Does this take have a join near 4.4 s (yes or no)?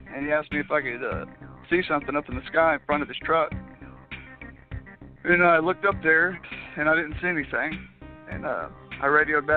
no